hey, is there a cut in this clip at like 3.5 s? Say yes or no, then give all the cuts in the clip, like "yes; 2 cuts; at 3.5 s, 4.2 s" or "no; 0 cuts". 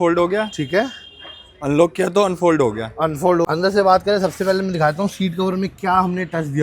yes; 1 cut; at 3.5 s